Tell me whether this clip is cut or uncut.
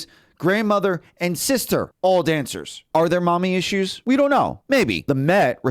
cut